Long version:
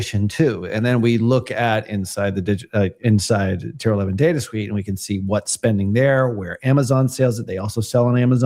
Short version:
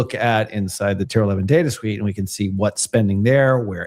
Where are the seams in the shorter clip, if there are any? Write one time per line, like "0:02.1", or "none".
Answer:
0:01.0